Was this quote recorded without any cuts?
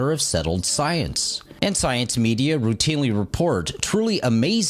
no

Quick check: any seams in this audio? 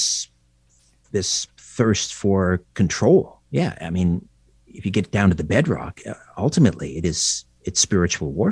no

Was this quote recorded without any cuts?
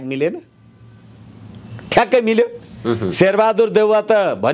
yes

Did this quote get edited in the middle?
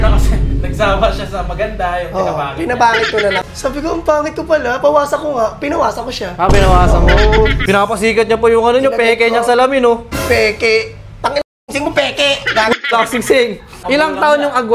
yes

